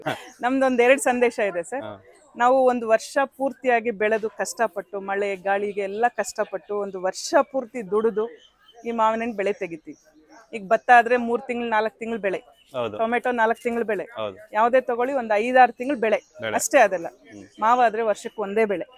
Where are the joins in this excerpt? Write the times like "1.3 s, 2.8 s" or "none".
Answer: none